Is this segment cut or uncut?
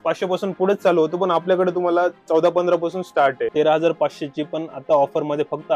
cut